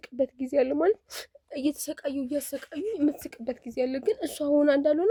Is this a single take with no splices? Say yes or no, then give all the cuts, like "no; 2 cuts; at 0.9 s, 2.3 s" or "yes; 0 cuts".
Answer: yes; 0 cuts